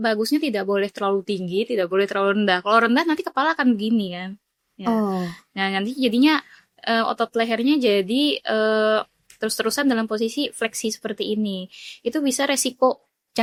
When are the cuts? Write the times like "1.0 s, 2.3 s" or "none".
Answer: none